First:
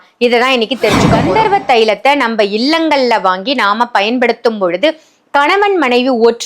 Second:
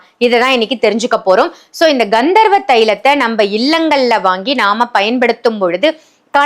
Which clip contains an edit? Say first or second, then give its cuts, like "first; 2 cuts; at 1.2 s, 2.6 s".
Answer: first; 1 cut; at 1.1 s